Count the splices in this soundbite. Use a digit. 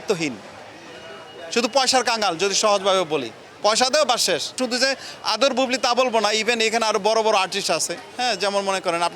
1